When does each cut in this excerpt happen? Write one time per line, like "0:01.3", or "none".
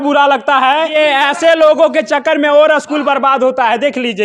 0:00.9